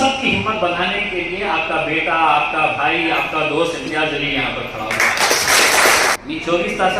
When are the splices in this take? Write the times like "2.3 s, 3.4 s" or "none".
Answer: 6.1 s